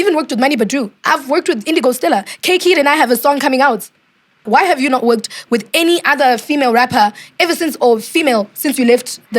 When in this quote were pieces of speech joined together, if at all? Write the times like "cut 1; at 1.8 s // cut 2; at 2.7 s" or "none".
cut 1; at 4.5 s